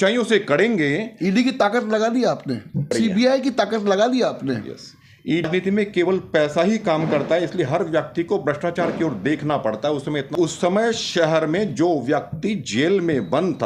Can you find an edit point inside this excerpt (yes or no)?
yes